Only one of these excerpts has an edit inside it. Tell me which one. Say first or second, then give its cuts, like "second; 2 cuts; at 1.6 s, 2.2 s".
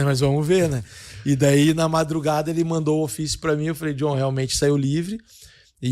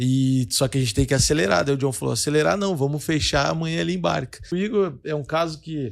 second; 1 cut; at 4.5 s